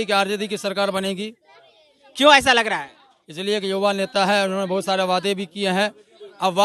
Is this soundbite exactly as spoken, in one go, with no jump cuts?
yes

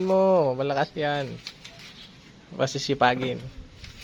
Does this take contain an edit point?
no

